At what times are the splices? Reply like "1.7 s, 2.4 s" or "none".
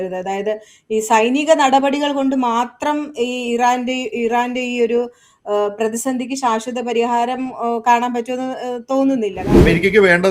9.4 s

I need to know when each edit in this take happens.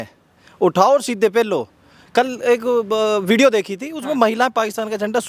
1.9 s

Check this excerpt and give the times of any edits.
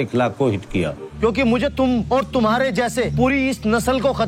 1.1 s, 2.1 s, 3.1 s

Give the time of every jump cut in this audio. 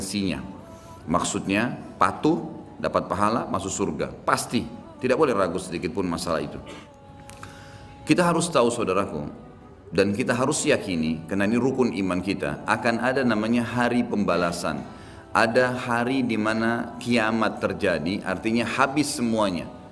7.0 s

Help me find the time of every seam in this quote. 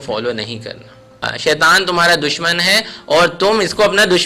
1.3 s

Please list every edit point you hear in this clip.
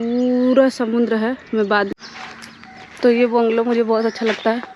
1.9 s

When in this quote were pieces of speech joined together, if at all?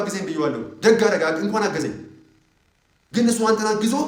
none

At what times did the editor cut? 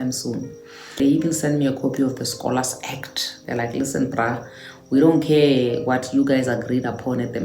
1.0 s

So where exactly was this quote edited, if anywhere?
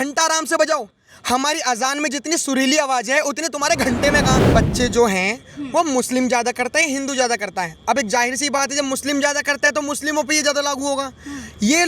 4.5 s

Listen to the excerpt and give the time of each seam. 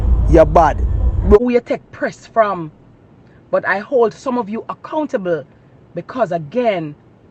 1.4 s

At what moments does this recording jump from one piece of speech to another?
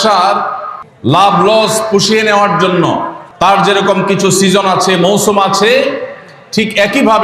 3.2 s

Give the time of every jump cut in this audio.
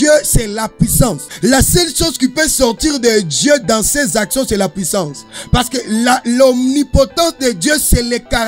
1.3 s

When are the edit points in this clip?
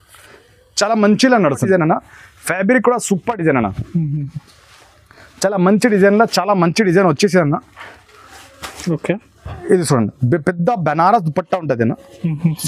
1.6 s

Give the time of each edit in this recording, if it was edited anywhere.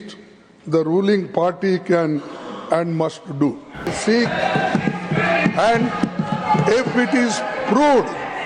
4.0 s

